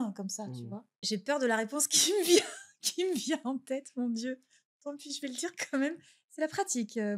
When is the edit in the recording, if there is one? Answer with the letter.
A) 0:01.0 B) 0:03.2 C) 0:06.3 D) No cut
A